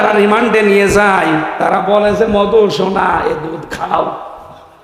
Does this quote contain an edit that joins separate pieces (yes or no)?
no